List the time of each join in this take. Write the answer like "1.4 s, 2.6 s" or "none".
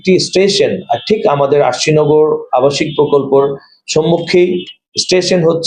none